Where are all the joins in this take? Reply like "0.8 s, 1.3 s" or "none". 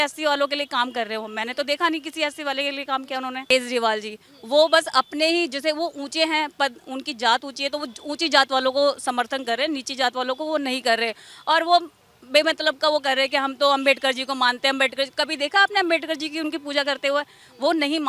3.5 s